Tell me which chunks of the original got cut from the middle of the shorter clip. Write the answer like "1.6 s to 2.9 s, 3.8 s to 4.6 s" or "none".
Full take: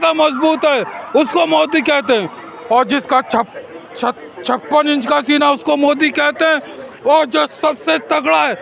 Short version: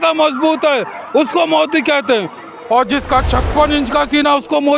3.3 s to 4.4 s